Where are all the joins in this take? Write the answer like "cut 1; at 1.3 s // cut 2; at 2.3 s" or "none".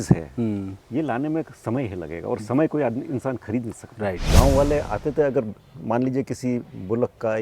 cut 1; at 4.3 s

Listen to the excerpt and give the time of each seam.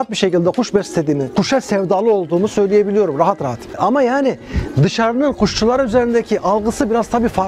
cut 1; at 1.3 s // cut 2; at 3.8 s

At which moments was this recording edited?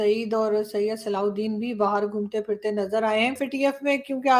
cut 1; at 3.4 s

